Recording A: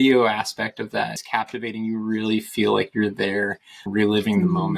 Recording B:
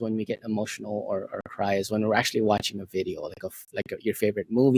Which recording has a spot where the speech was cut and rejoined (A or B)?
A